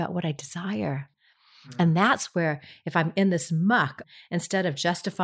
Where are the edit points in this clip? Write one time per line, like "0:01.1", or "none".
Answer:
0:01.1
0:04.1

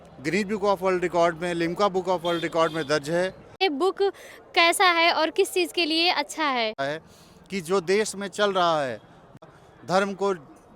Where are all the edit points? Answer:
0:03.6
0:06.8
0:09.5

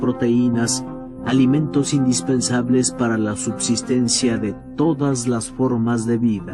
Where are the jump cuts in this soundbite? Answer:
0:05.3

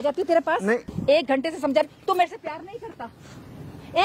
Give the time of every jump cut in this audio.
0:00.9

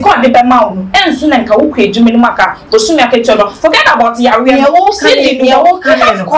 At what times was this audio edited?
none

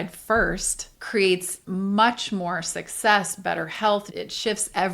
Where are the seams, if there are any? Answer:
0:01.6
0:04.1

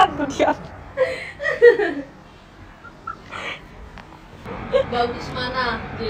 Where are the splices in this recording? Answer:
0:04.5

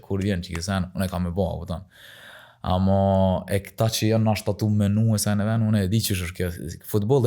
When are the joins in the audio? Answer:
none

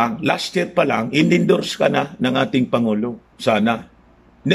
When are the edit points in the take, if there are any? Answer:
0:03.3

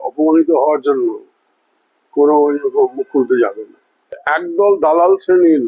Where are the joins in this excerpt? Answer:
0:04.2

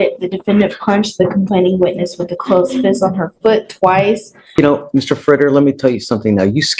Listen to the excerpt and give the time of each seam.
0:04.6

